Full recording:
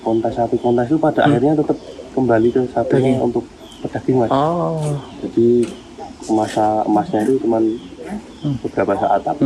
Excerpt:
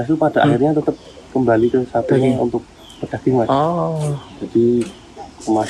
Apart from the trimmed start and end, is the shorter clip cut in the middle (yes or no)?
no